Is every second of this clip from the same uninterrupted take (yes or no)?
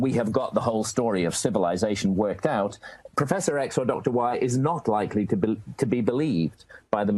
yes